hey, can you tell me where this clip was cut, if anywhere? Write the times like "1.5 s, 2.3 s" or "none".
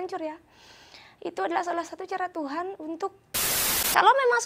3.3 s